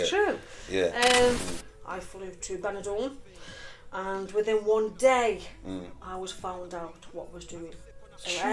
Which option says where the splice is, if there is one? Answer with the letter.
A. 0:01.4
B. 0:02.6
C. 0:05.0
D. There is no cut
A